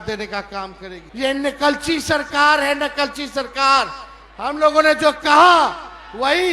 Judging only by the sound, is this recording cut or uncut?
cut